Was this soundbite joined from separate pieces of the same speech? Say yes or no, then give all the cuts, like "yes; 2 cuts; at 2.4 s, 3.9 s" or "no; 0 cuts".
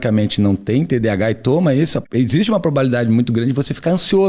yes; 1 cut; at 2.0 s